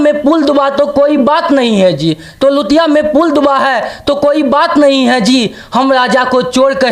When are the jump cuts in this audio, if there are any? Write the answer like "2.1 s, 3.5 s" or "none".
none

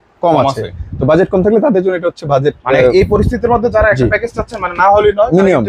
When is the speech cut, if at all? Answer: none

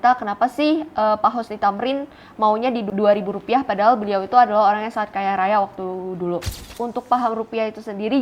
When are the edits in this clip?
2.9 s, 6.7 s

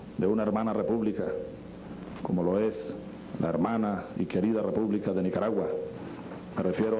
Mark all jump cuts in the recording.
none

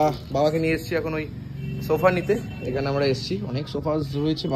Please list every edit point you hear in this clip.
none

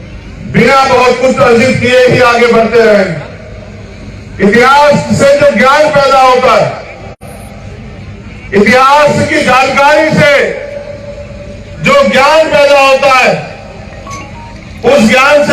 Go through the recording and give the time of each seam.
1.6 s

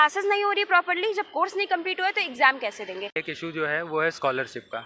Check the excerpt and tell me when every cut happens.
3.2 s

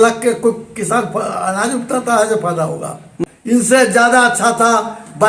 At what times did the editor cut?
3.1 s

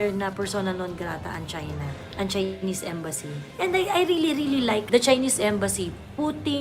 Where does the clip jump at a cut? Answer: 3.4 s, 4.8 s

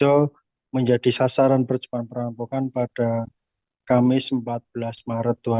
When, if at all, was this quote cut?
none

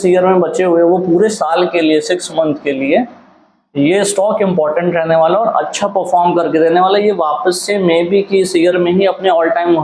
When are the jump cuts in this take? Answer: none

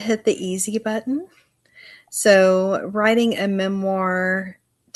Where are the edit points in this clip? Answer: none

